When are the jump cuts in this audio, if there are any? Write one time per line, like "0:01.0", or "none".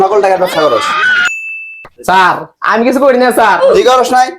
0:01.4